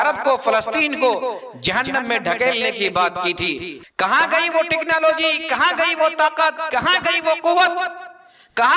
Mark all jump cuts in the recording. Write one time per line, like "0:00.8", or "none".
0:03.8